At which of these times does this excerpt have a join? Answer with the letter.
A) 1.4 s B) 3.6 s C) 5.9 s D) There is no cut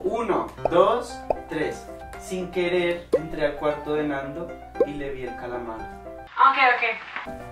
C